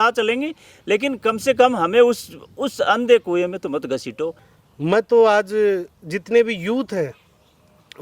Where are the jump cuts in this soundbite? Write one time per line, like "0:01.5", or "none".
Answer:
0:04.5